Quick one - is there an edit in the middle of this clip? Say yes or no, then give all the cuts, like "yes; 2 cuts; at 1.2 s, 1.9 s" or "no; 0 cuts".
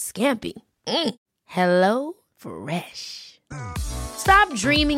no; 0 cuts